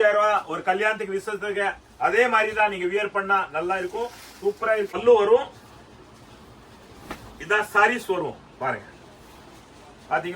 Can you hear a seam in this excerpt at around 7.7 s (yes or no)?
no